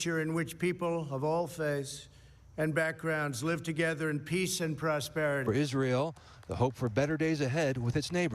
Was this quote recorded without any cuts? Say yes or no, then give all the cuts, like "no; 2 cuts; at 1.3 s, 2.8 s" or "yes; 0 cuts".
no; 1 cut; at 5.4 s